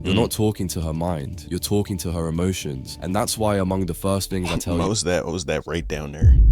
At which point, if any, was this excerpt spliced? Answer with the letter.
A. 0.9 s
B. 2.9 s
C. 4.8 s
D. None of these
D